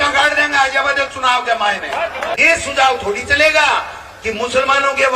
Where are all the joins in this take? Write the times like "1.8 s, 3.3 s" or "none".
2.3 s